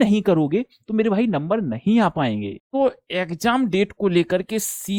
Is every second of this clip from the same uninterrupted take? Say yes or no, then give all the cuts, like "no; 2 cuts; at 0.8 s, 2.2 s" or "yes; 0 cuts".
no; 1 cut; at 2.6 s